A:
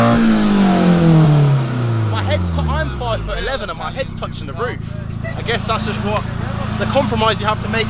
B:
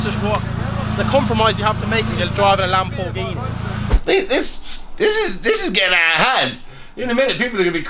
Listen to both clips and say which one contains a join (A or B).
B